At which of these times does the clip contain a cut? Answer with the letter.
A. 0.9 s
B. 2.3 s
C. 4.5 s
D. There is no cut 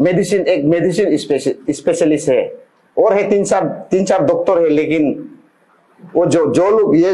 D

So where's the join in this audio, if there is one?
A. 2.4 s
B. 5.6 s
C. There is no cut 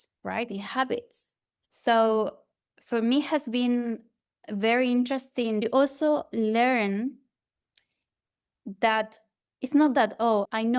B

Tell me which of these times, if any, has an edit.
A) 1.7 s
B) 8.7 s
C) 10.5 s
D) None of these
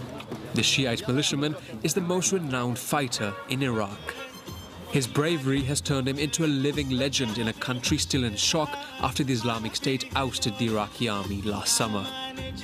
A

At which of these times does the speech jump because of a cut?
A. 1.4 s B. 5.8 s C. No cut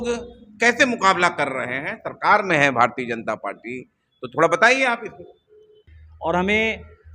B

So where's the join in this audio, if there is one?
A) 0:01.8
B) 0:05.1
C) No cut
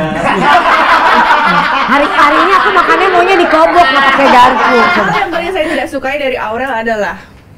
B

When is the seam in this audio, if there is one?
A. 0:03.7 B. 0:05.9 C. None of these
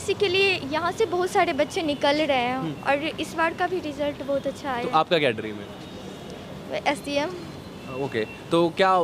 C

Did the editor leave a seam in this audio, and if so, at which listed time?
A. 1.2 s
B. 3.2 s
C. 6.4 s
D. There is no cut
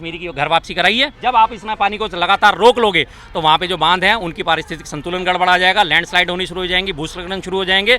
A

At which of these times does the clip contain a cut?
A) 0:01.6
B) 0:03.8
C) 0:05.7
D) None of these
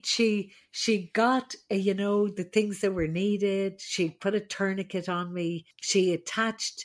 C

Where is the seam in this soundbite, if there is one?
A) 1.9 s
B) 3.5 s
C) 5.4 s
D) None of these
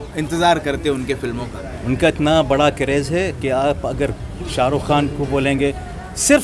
D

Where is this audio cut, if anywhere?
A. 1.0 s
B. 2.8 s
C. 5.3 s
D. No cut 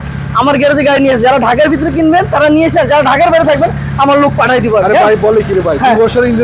D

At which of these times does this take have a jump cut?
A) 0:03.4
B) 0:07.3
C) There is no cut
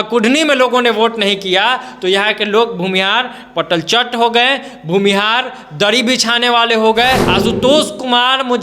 B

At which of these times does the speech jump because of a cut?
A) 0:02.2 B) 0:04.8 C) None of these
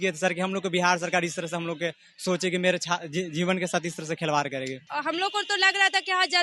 B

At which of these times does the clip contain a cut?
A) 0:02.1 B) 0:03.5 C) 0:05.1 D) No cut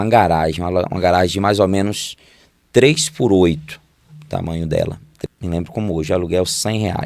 C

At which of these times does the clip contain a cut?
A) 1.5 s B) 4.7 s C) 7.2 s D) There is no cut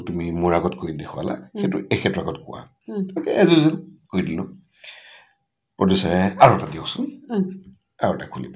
D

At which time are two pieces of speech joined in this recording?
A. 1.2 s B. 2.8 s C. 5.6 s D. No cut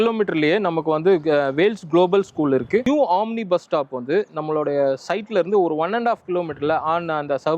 B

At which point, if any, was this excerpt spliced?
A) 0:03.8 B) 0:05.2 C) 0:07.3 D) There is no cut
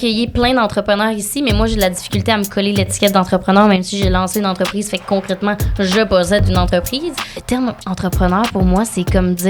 C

